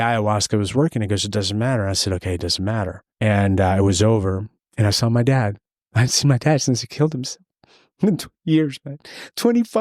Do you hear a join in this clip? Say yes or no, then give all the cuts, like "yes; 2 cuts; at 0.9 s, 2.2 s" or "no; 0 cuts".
yes; 1 cut; at 3.0 s